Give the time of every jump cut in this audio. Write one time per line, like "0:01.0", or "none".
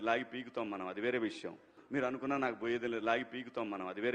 none